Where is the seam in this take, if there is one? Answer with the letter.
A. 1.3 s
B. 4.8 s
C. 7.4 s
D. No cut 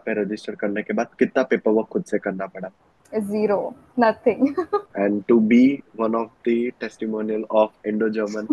B